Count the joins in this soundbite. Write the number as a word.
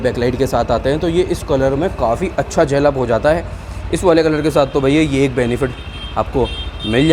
zero